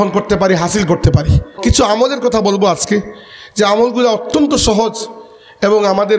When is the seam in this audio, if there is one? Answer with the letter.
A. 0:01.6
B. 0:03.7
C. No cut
A